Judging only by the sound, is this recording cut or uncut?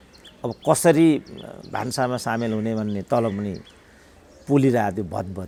uncut